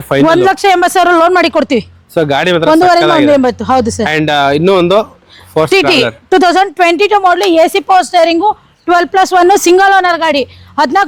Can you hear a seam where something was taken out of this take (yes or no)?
no